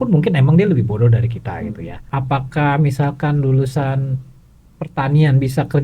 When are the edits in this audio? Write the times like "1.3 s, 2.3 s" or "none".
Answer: 1.9 s

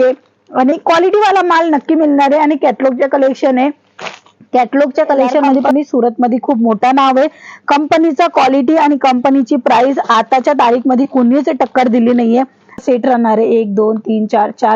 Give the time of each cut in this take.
5.6 s, 12.8 s

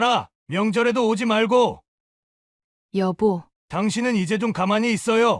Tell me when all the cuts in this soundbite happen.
1.9 s, 3.5 s

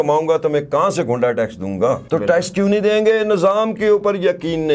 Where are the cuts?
2.0 s

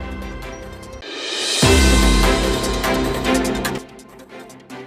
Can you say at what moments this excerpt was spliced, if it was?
1.0 s, 3.4 s

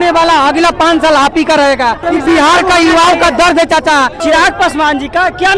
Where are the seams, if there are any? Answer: 2.0 s, 4.2 s

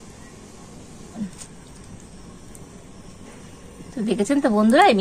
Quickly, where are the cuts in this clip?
1.2 s

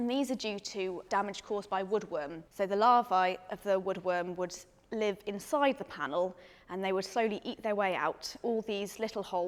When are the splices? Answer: none

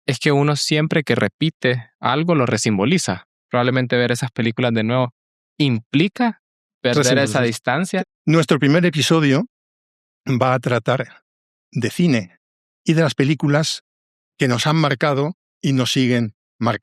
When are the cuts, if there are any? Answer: 3.3 s, 8.0 s

